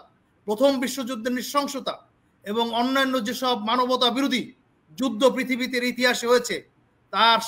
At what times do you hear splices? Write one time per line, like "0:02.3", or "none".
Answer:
none